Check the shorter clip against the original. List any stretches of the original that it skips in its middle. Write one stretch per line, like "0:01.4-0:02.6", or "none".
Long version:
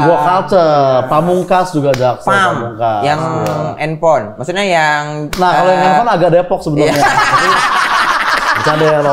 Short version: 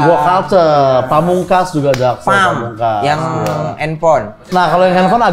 0:04.4-0:05.2

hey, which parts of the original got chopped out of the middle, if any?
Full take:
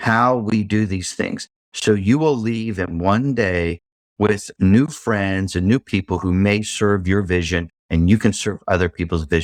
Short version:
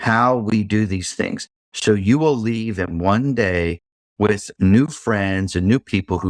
none

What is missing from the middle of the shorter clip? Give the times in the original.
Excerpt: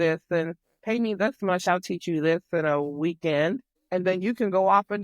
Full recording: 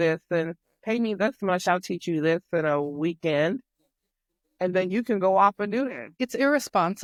0:03.7-0:04.4

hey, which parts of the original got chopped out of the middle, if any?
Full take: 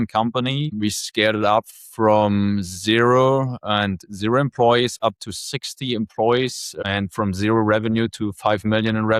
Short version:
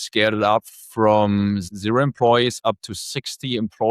0:02.7-0:04.1

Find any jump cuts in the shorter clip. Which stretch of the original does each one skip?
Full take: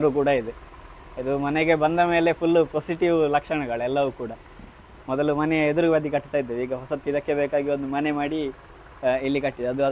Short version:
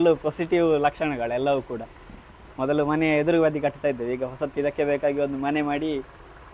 none

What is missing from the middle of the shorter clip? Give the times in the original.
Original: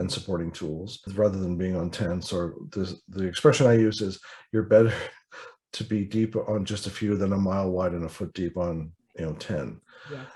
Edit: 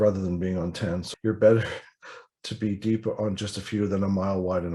0:02.2-0:04.3

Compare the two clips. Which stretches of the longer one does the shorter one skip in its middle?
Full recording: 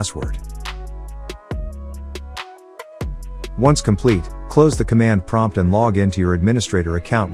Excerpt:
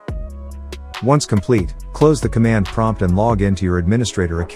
0:02.4-0:03.6

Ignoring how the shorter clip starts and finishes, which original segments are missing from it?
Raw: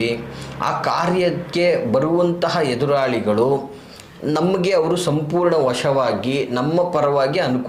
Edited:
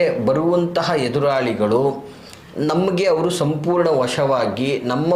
none

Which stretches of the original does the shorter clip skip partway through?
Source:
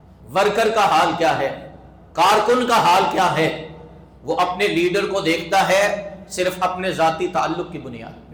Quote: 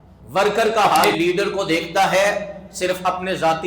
0:01.1-0:04.7

